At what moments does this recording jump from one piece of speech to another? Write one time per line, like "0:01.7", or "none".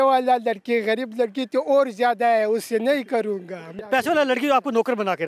0:03.8